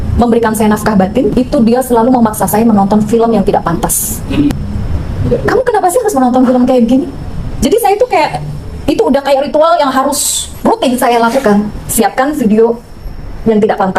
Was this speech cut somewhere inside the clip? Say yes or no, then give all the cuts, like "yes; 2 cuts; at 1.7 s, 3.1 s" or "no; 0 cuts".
no; 0 cuts